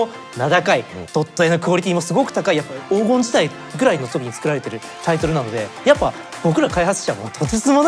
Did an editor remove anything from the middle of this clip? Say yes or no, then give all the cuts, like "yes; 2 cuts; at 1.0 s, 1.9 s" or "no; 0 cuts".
yes; 2 cuts; at 1.0 s, 2.7 s